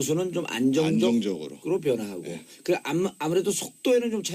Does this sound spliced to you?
yes; 1 cut; at 1.2 s

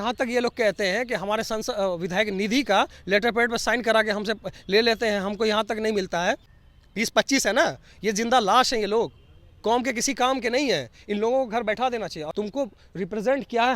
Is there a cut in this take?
yes; 2 cuts; at 6.6 s, 12.2 s

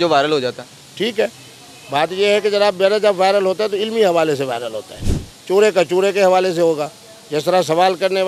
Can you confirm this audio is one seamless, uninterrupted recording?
yes; 0 cuts

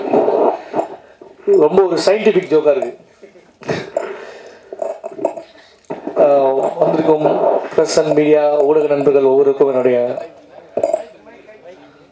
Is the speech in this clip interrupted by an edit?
no; 0 cuts

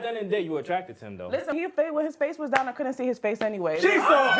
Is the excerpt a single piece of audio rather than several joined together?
no; 1 cut; at 1.5 s

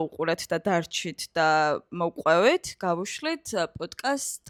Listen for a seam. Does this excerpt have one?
no; 0 cuts

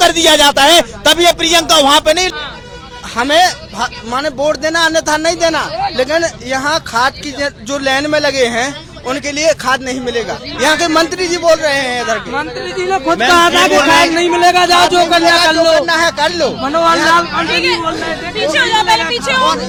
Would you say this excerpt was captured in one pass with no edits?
yes; 0 cuts

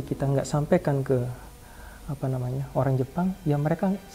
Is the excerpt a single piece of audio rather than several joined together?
yes; 0 cuts

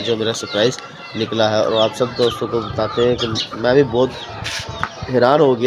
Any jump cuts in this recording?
no; 0 cuts

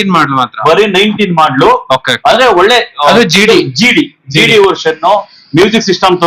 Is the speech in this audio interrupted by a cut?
no; 0 cuts

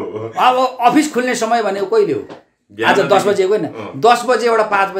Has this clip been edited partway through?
no; 0 cuts

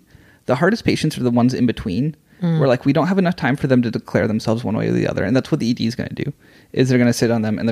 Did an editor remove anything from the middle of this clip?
no; 0 cuts

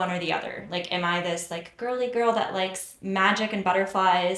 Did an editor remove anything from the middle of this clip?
no; 0 cuts

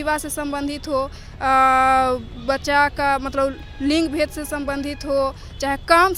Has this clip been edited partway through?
no; 0 cuts

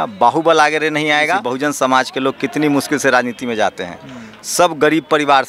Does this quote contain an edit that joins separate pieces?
yes; 1 cut; at 1.5 s

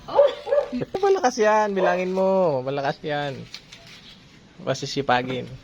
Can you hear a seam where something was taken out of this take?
yes; 1 cut; at 0.9 s

